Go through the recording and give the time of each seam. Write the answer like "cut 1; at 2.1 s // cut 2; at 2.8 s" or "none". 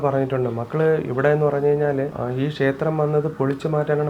cut 1; at 2.2 s

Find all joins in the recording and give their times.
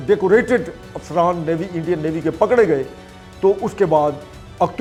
none

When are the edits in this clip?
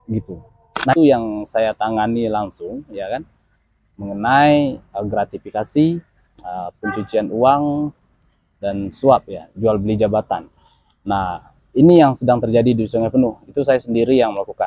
cut 1; at 0.9 s

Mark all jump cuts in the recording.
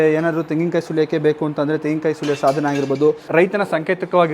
cut 1; at 3.3 s

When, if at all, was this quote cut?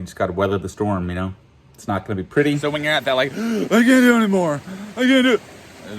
cut 1; at 2.6 s

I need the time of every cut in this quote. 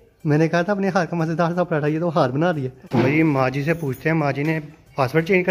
cut 1; at 2.8 s

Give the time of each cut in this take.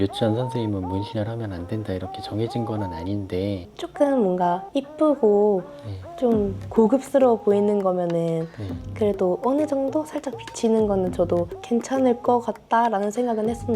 cut 1; at 3.7 s

